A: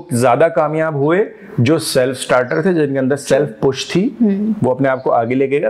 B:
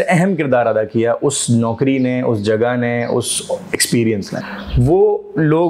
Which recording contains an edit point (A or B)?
B